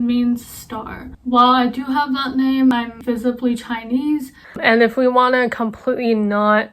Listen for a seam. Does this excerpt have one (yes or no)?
yes